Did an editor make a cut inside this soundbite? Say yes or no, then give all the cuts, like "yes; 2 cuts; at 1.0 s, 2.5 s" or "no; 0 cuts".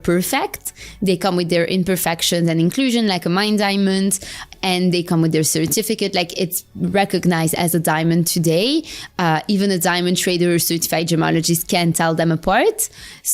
yes; 1 cut; at 4.5 s